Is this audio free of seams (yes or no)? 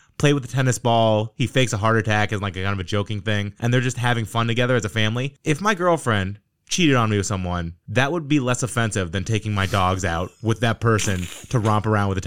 yes